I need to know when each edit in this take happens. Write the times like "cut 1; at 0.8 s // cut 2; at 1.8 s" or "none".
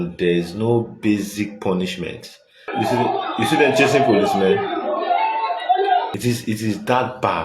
cut 1; at 2.7 s

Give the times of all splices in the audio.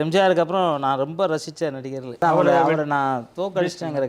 cut 1; at 2.2 s

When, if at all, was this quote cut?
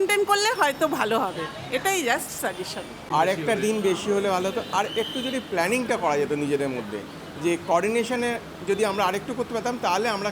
cut 1; at 3.1 s

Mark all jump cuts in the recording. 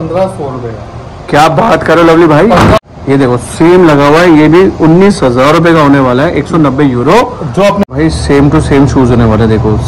cut 1; at 2.9 s // cut 2; at 7.9 s

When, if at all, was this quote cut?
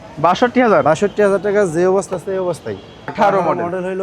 cut 1; at 3.1 s

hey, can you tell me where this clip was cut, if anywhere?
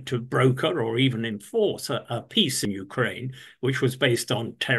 cut 1; at 2.6 s

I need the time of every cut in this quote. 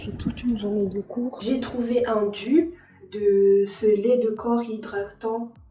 cut 1; at 1.4 s

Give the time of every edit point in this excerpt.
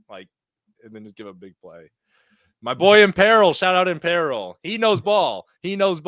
none

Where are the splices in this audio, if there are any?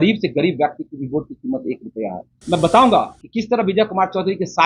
cut 1; at 2.3 s

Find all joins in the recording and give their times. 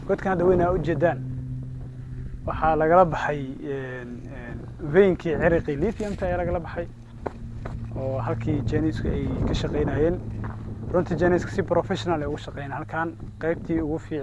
none

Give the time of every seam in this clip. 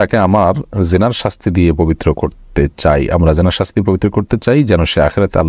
none

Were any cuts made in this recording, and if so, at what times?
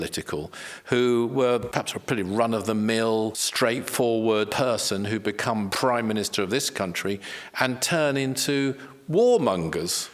cut 1; at 1.7 s // cut 2; at 3.4 s // cut 3; at 4.5 s // cut 4; at 5.7 s

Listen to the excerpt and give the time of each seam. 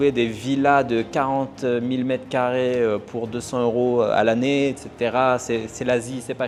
none

